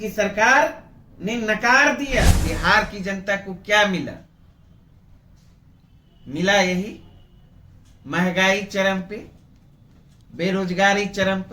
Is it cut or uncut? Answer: cut